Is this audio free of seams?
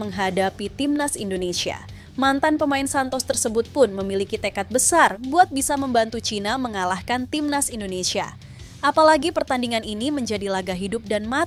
yes; 0 cuts

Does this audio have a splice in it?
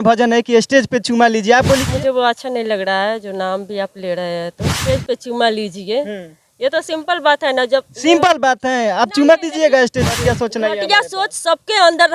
yes; 3 cuts; at 1.8 s, 4.8 s, 10.2 s

